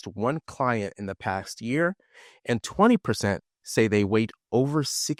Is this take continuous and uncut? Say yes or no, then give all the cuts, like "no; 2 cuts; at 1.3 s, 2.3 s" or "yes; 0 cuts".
yes; 0 cuts